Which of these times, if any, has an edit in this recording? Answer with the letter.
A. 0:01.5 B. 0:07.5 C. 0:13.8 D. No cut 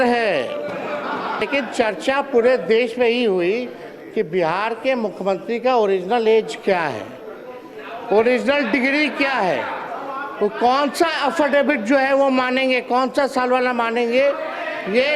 A